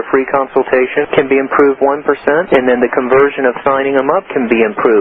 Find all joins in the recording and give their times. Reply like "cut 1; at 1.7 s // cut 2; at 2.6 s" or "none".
cut 1; at 1.0 s // cut 2; at 2.4 s